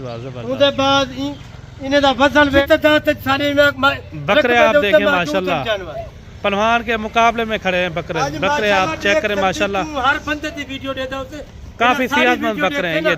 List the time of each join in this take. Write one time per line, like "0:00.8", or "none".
0:02.6